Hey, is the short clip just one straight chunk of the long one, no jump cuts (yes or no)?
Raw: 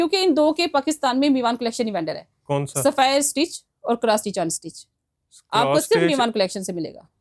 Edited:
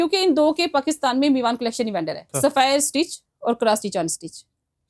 no